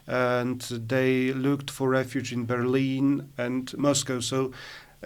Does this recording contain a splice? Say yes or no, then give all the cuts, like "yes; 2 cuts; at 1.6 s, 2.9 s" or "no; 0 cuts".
no; 0 cuts